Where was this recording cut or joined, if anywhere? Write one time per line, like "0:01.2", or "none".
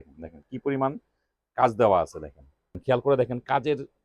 0:02.8